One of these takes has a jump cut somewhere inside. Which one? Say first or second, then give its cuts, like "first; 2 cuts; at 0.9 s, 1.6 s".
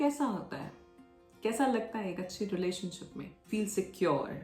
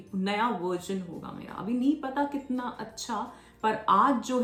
first; 1 cut; at 3.4 s